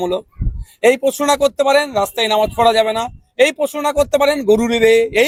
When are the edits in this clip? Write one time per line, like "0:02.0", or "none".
none